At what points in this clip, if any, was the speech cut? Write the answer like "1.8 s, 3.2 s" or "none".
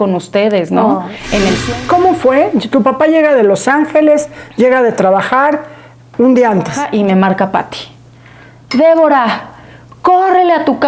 1.6 s, 6.8 s